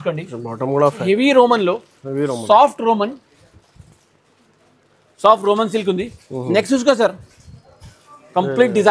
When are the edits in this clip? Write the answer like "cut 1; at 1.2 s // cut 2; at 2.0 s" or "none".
cut 1; at 1.1 s